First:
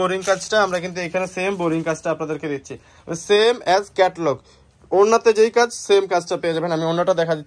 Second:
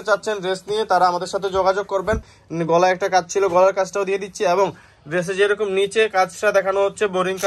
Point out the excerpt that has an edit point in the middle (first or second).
second